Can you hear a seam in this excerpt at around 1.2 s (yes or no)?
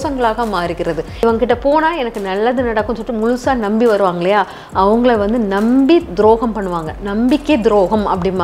yes